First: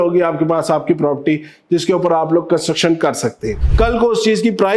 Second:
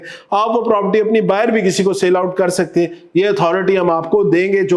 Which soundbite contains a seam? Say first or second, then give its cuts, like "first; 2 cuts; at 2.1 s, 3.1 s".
first; 1 cut; at 3.5 s